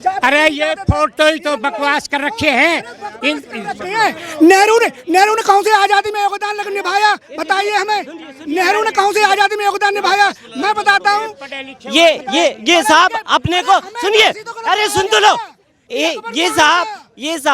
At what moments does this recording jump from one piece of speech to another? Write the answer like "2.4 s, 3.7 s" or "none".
none